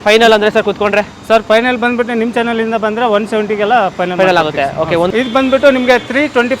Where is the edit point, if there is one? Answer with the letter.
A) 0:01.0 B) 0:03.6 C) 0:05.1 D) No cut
C